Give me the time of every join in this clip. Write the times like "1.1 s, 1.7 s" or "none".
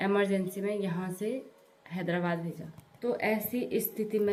none